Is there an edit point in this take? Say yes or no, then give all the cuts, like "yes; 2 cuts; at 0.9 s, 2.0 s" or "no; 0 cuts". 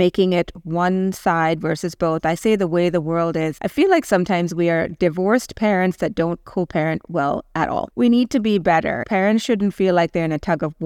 yes; 3 cuts; at 3.5 s, 7.9 s, 9.0 s